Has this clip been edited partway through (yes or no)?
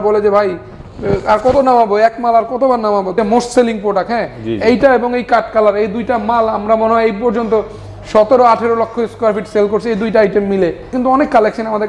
yes